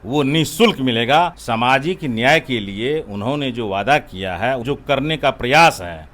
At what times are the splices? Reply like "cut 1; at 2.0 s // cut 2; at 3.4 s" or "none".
cut 1; at 1.4 s // cut 2; at 4.6 s

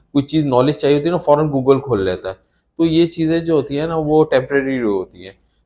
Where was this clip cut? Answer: none

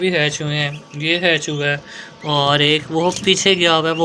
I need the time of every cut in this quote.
none

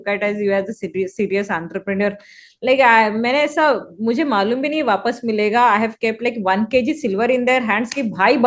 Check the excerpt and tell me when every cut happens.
none

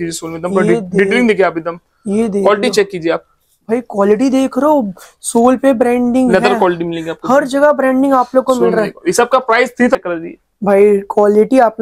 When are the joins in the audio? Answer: cut 1; at 10.0 s

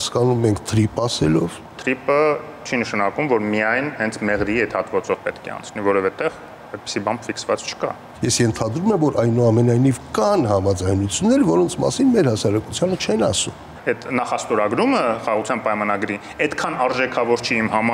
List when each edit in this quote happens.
cut 1; at 1.7 s // cut 2; at 8.0 s // cut 3; at 13.7 s

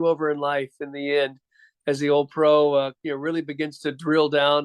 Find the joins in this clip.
none

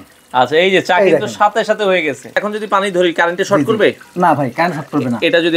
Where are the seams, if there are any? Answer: cut 1; at 2.4 s // cut 2; at 4.1 s

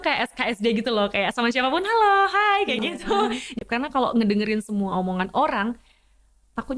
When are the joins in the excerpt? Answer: cut 1; at 3.5 s

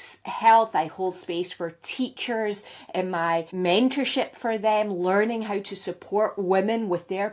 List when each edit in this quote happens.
cut 1; at 3.5 s

